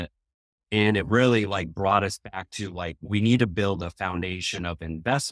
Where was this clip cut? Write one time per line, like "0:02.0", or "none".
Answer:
none